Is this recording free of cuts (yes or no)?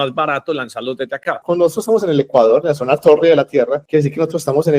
no